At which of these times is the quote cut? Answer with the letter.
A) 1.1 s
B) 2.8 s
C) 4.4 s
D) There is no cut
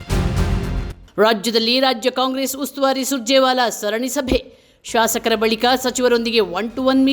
A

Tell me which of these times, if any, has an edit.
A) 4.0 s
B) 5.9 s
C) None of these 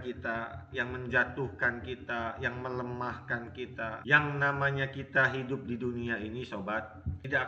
A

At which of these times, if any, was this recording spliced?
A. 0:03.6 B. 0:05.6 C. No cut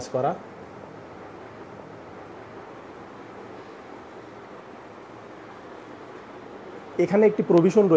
C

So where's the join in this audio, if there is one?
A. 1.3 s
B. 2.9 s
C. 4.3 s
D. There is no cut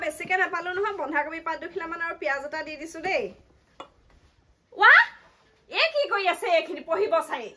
D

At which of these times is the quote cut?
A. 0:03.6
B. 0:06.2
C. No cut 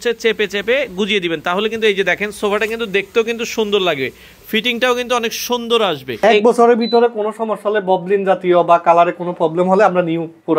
B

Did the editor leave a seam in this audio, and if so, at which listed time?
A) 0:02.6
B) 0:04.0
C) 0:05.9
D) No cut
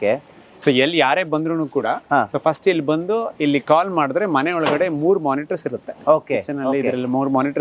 D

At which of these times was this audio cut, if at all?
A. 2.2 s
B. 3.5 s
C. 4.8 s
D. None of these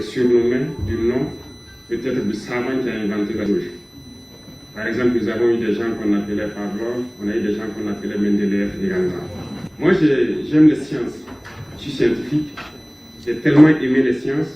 B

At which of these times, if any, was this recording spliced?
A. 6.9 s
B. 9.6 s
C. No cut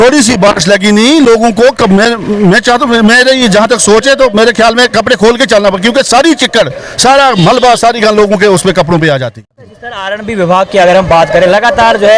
B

